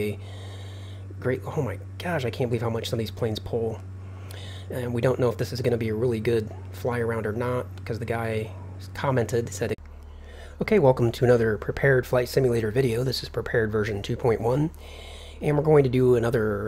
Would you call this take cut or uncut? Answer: uncut